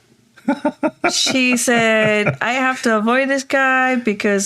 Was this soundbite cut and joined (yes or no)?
no